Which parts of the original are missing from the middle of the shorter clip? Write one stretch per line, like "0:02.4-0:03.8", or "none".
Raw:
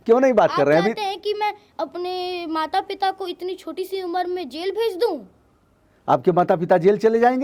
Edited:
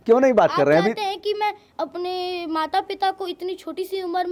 none